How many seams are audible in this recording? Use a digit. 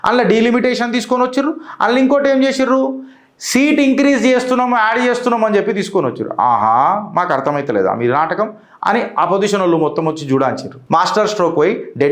1